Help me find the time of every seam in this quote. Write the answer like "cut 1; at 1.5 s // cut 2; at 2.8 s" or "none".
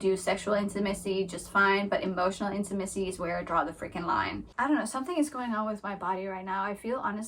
cut 1; at 4.5 s